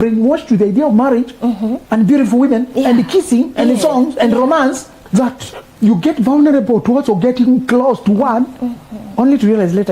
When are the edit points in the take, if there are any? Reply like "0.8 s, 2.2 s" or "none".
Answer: 1.8 s, 4.9 s